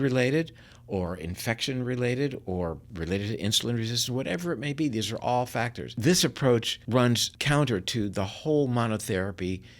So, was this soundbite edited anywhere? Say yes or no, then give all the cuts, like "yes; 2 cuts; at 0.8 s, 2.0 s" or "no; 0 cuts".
yes; 2 cuts; at 5.9 s, 7.1 s